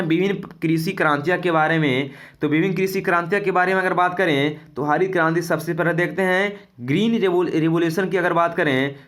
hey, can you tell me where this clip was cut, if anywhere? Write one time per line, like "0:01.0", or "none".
none